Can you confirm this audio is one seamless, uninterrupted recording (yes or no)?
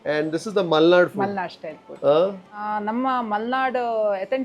no